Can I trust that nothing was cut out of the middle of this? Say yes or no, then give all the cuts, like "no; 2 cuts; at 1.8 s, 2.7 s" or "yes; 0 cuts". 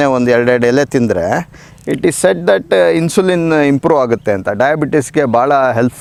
yes; 0 cuts